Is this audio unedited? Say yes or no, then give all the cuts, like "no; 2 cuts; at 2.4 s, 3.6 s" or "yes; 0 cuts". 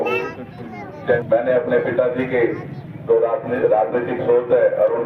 no; 1 cut; at 1.2 s